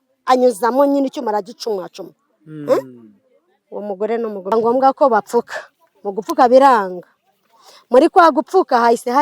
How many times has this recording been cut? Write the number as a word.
one